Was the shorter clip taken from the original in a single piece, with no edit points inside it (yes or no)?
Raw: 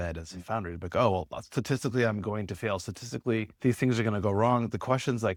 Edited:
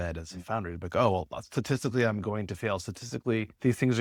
yes